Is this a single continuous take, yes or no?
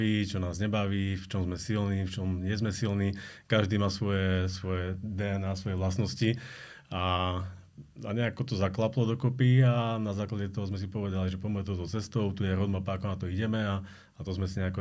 yes